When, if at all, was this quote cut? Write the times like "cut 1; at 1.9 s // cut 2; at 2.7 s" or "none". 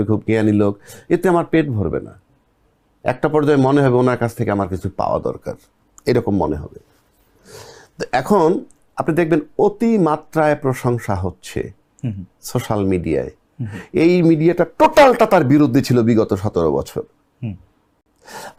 none